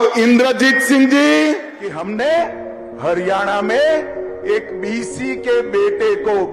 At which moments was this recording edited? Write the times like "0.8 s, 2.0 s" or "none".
1.8 s

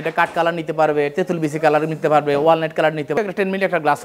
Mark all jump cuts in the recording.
3.1 s

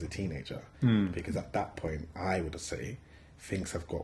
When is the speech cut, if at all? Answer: none

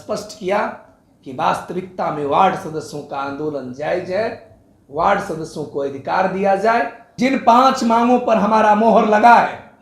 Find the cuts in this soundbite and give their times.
7.0 s

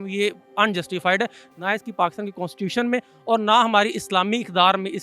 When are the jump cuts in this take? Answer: 1.4 s

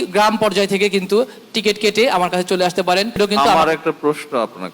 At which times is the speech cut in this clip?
3.2 s

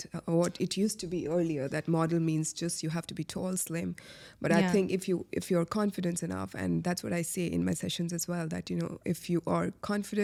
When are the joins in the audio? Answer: none

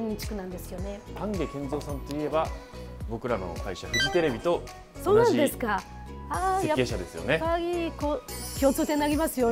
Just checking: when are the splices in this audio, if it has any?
1.2 s

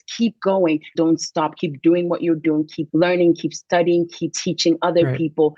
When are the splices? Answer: 0.9 s, 2.8 s, 4.3 s

